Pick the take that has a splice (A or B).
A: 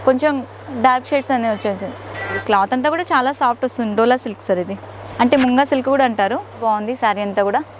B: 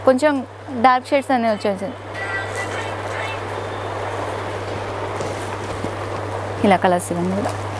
A